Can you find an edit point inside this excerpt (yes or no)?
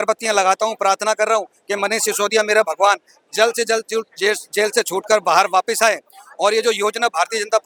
no